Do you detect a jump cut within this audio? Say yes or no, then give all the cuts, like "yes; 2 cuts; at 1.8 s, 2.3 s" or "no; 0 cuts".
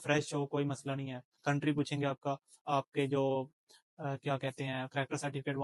yes; 1 cut; at 1.2 s